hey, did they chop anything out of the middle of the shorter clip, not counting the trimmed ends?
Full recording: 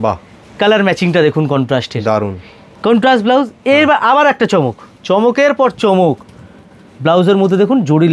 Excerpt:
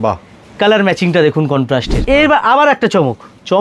yes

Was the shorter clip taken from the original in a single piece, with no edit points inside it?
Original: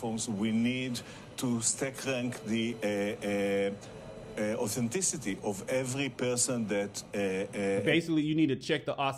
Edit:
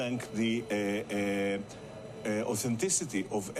yes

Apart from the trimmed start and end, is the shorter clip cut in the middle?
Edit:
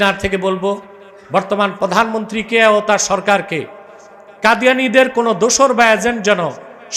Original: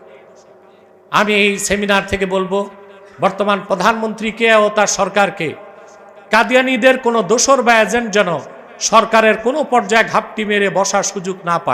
no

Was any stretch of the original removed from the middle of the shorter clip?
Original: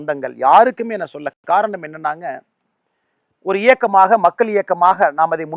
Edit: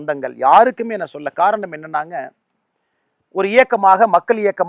yes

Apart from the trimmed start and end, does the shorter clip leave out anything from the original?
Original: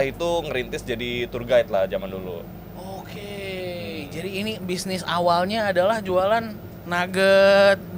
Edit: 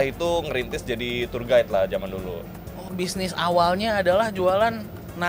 yes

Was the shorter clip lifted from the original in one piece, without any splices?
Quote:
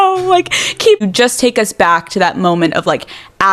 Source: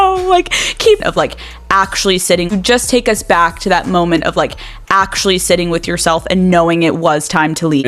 no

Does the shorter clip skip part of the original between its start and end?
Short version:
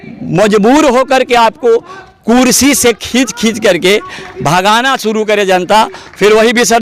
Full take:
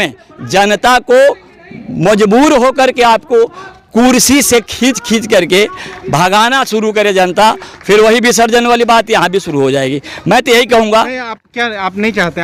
no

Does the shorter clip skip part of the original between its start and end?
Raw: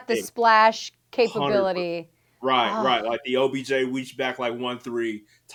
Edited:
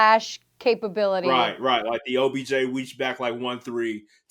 yes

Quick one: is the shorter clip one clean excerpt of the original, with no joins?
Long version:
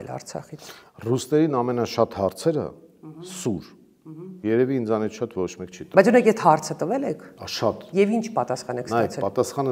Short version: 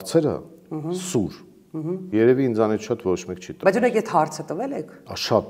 yes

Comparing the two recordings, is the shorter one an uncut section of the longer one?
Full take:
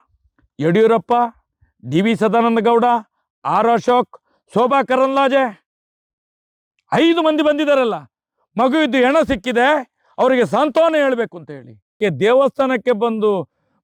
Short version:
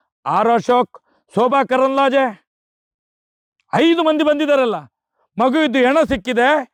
yes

